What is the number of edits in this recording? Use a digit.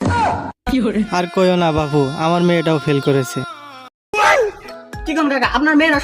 1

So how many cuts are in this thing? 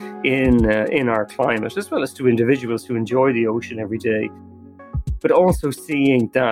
0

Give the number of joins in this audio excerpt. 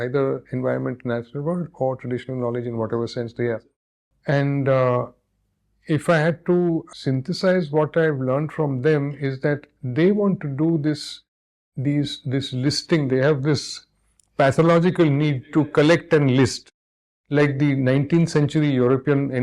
2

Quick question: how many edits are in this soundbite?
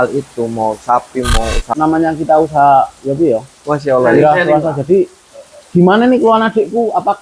1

